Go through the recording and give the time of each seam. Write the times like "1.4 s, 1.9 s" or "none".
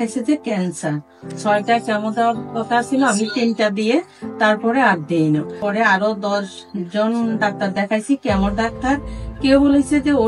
1.2 s, 5.6 s

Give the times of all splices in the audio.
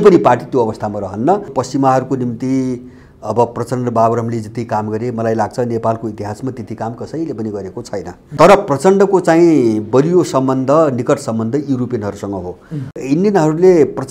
1.6 s, 8.3 s, 13.0 s

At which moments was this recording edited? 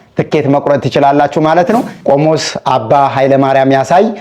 1.9 s

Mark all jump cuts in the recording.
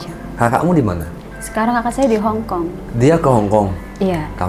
none

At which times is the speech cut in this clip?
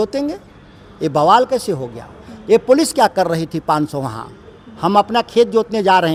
none

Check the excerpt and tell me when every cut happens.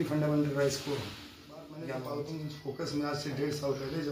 1.9 s

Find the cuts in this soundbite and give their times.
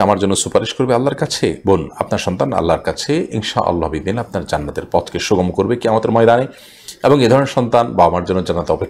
none

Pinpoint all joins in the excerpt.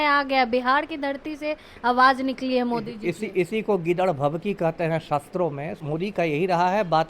5.8 s

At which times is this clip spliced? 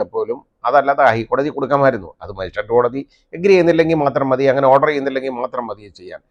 none

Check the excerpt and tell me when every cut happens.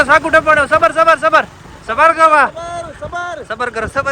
none

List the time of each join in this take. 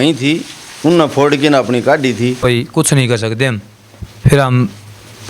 2.4 s

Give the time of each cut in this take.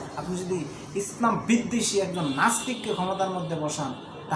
none

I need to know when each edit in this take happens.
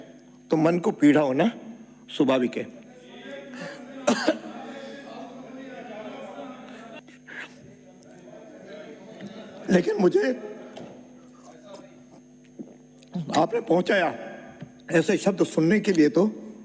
7.0 s

